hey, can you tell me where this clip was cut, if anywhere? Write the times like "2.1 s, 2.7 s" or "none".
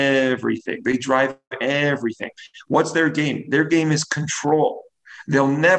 none